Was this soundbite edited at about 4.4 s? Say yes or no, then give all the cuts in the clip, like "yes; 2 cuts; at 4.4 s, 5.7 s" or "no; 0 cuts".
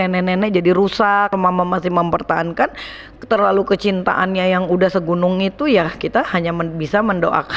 no; 1 cut; at 1.3 s